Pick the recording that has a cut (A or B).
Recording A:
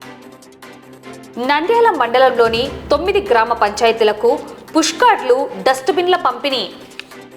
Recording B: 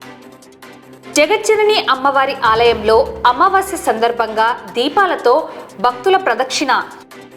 A